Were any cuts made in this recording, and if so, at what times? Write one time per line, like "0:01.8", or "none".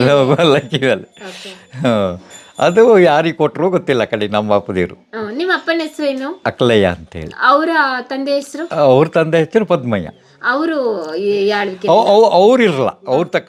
none